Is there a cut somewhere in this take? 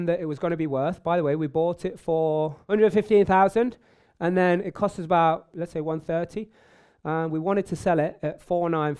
yes; 2 cuts; at 2.6 s, 5.5 s

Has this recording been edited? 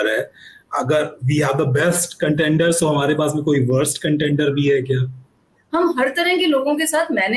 yes; 1 cut; at 5.6 s

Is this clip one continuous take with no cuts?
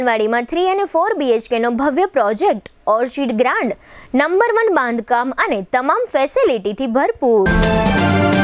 no; 1 cut; at 7.5 s

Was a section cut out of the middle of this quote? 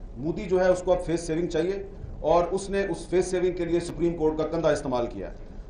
no; 0 cuts

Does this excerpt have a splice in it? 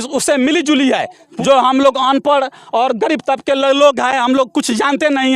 yes; 1 cut; at 1.2 s

